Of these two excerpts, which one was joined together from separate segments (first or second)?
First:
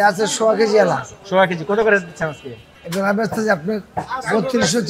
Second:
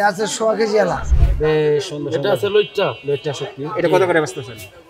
second